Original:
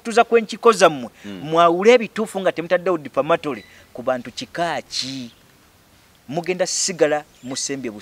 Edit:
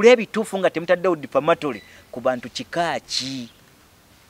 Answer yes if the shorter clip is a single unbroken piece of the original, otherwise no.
yes